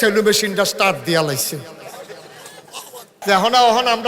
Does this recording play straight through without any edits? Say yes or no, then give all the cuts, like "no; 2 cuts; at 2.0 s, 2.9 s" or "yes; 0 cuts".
no; 1 cut; at 3.2 s